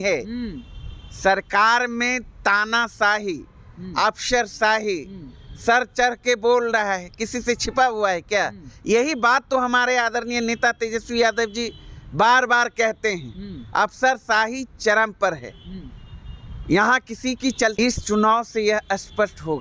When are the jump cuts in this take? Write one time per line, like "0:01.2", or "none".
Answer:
0:17.8